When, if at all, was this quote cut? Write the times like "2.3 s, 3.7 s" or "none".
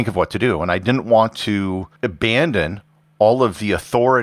1.9 s